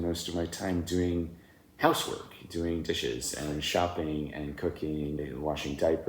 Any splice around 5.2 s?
yes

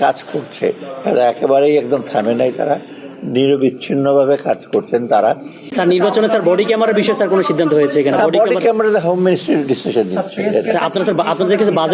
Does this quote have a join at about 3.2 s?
no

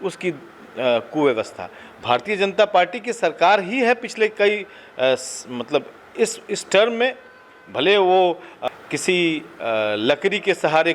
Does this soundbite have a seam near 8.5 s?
yes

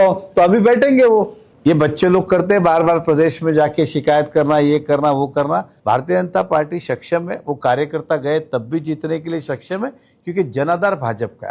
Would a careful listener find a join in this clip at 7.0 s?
no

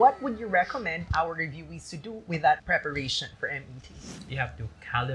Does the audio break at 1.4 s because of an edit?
no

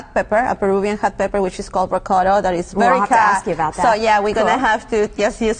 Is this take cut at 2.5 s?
yes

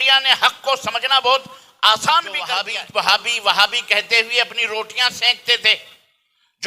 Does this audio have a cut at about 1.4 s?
no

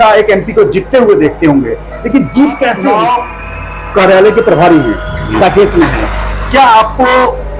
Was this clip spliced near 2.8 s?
yes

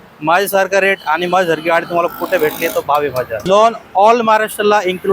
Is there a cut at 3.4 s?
yes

